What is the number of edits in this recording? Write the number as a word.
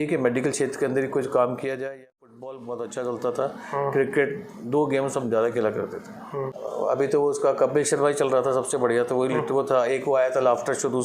two